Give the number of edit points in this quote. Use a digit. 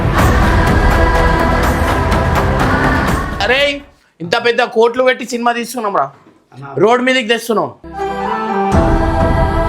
1